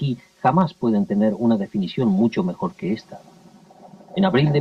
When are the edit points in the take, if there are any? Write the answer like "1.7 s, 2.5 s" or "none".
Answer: 3.0 s